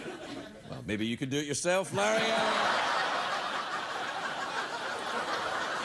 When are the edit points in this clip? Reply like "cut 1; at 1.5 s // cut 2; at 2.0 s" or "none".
cut 1; at 2.5 s